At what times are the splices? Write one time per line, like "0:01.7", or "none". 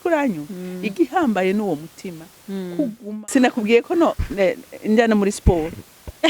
0:03.0